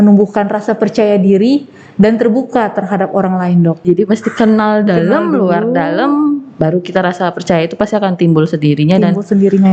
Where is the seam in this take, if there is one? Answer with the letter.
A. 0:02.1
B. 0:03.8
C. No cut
B